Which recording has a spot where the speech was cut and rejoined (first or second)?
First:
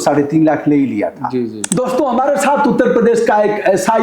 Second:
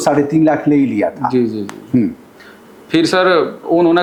first